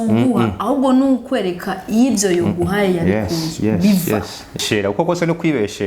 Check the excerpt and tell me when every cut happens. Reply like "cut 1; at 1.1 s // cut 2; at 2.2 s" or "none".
cut 1; at 4.6 s